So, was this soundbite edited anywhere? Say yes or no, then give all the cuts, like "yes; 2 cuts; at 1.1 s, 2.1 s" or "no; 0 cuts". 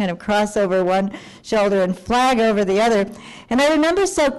no; 0 cuts